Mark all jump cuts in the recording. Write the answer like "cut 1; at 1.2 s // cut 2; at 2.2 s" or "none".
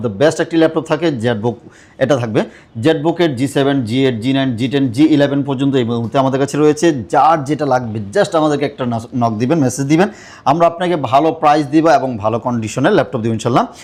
none